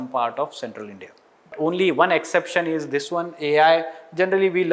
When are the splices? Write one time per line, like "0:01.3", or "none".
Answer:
0:01.5